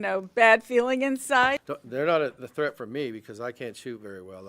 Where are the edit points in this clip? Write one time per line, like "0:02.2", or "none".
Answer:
0:01.6